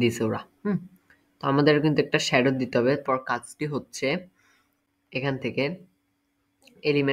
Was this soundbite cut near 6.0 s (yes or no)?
no